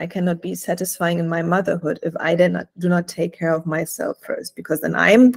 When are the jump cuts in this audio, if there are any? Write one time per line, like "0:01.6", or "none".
none